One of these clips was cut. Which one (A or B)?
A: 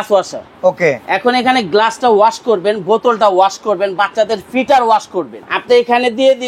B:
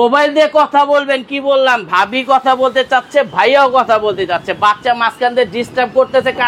A